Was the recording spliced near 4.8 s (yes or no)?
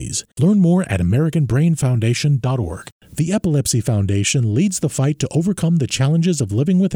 no